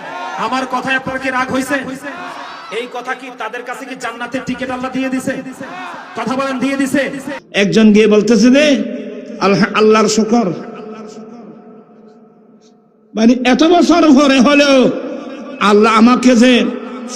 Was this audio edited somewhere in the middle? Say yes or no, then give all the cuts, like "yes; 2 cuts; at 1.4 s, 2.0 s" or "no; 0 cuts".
yes; 1 cut; at 7.4 s